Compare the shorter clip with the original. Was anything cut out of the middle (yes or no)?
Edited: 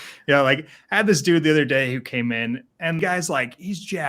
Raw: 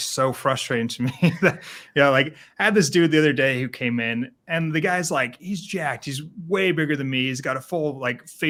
yes